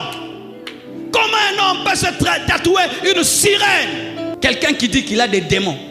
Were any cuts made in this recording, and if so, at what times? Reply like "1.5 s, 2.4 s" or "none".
4.3 s